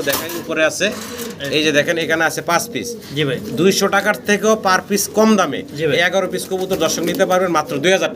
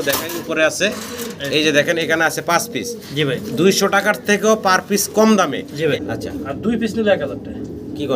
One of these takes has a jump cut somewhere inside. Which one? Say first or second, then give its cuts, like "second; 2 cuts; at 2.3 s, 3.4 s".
second; 1 cut; at 6.0 s